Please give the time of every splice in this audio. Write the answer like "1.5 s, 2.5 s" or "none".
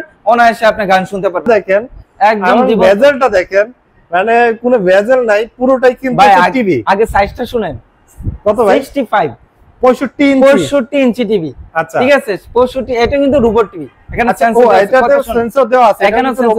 1.4 s